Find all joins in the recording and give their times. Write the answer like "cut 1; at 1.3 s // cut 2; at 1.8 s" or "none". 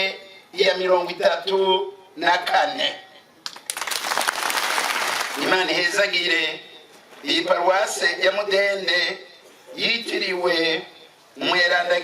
cut 1; at 5.3 s